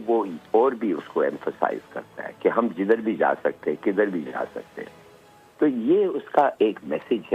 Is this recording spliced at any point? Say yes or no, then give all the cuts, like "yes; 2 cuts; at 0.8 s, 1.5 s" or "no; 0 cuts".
no; 0 cuts